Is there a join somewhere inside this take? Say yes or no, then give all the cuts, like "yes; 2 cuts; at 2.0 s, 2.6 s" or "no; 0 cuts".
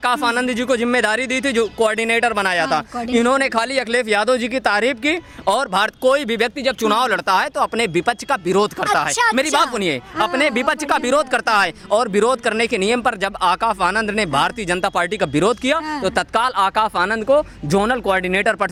no; 0 cuts